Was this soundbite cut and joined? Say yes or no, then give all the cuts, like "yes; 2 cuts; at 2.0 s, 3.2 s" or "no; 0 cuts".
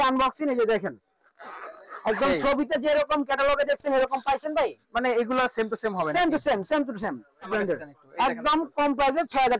yes; 1 cut; at 7.5 s